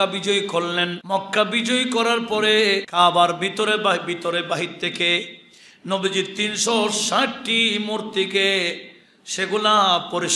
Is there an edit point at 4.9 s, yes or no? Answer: no